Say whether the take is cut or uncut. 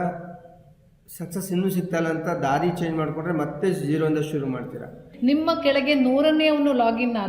cut